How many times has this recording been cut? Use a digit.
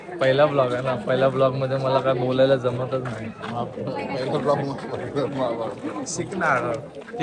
0